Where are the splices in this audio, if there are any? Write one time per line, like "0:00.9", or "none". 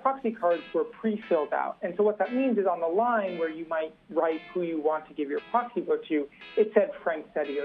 none